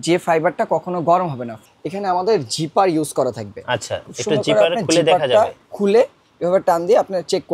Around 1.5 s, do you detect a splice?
yes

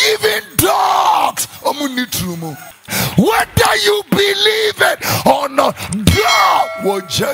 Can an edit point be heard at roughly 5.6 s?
no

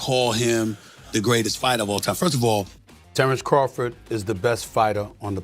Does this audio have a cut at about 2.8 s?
yes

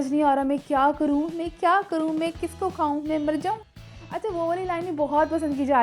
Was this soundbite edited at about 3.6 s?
yes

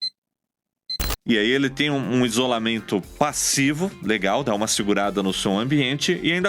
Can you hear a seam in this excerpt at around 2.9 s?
no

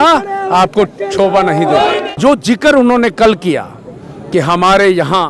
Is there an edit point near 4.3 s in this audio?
no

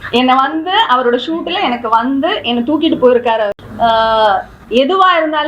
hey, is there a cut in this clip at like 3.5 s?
yes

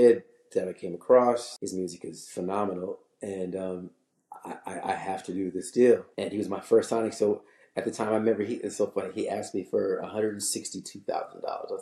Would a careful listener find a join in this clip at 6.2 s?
yes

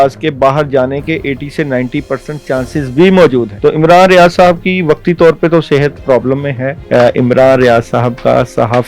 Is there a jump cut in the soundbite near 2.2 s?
no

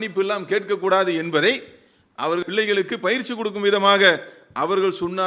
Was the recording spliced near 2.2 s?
no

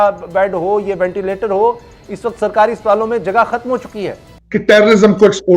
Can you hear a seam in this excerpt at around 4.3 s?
yes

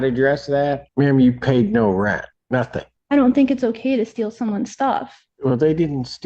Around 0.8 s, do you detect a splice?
yes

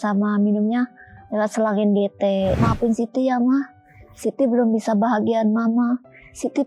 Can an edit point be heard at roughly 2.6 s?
yes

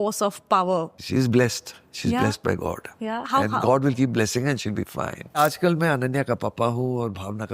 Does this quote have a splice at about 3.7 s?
no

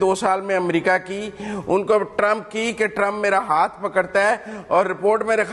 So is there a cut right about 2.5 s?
no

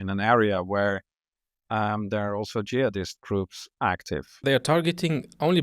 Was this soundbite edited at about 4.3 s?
yes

